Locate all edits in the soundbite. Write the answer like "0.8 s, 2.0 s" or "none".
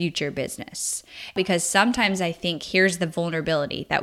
1.3 s